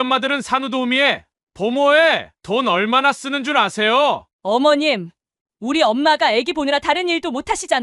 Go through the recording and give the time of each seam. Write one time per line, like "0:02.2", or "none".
0:04.3